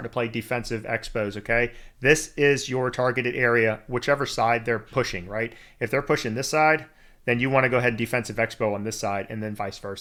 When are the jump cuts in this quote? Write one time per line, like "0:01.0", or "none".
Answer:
none